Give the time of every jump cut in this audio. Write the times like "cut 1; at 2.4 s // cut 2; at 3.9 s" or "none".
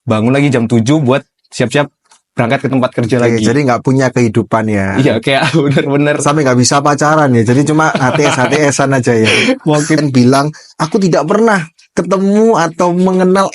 cut 1; at 10.0 s

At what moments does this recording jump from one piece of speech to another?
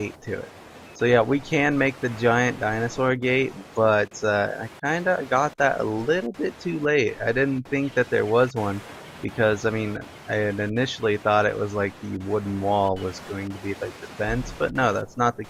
none

